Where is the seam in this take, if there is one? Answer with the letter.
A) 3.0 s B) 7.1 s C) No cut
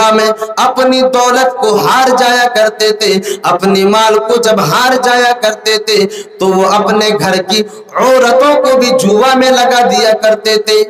C